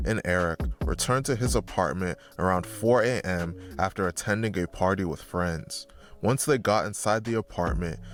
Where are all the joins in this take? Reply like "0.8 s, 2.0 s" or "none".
none